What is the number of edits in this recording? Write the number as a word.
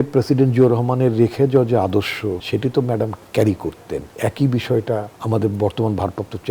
one